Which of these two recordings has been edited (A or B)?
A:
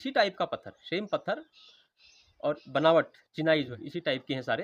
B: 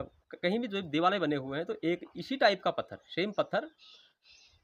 A